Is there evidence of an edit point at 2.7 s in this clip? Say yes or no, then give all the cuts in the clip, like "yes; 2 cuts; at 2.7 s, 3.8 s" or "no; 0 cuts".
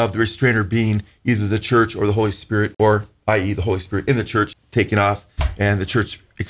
yes; 2 cuts; at 2.7 s, 4.6 s